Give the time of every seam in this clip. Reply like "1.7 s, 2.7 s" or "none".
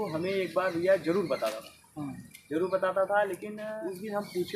3.7 s